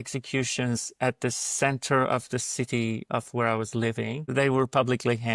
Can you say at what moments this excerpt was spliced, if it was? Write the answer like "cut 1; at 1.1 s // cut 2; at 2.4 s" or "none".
cut 1; at 4.2 s